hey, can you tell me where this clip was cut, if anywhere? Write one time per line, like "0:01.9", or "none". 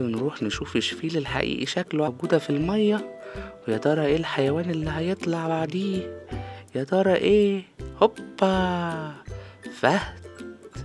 0:02.1